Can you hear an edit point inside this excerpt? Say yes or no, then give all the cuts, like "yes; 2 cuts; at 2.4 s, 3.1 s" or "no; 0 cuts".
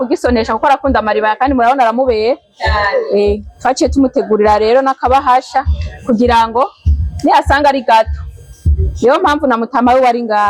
no; 0 cuts